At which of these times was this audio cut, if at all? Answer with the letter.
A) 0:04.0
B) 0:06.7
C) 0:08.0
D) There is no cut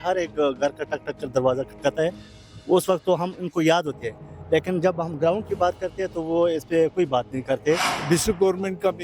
C